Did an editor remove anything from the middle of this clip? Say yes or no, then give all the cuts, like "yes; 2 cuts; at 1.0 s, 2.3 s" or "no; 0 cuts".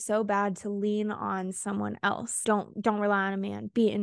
yes; 1 cut; at 2.4 s